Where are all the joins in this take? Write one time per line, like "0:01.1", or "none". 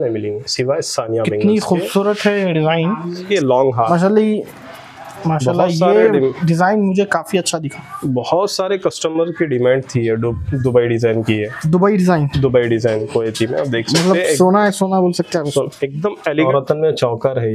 0:03.3
0:16.5

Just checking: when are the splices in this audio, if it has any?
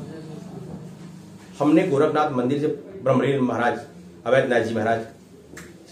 none

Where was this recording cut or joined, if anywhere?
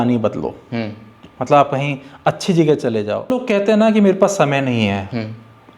0:03.3

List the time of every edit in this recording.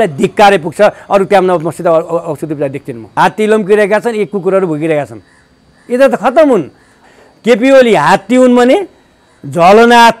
0:03.0
0:07.0

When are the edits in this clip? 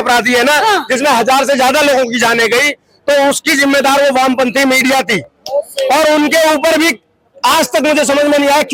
none

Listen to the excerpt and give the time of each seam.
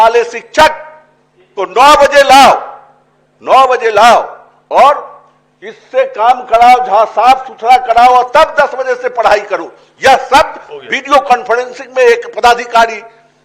none

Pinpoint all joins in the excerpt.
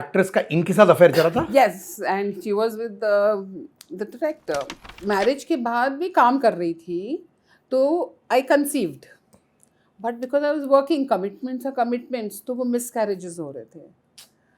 0:04.9

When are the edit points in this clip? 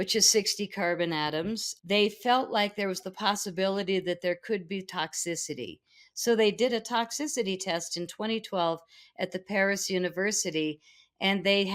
0:01.7

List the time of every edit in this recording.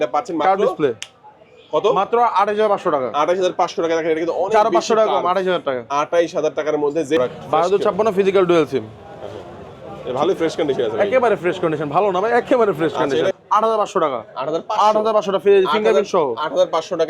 0:07.2
0:13.3

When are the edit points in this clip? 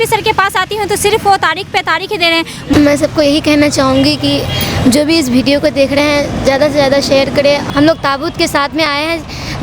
0:02.7
0:07.6

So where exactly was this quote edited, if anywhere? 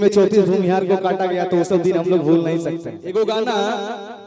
0:03.4

